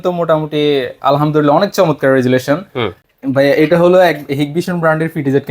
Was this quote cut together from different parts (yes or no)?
yes